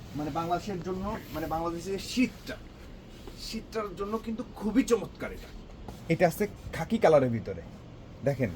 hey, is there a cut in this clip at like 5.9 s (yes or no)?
yes